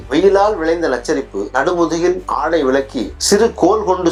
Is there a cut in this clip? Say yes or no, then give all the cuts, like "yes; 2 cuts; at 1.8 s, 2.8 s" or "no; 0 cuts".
no; 0 cuts